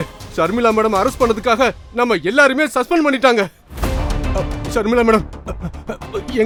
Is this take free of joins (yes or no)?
yes